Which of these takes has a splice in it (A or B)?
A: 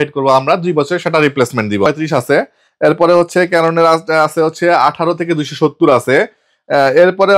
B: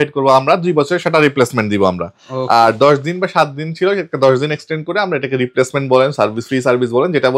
A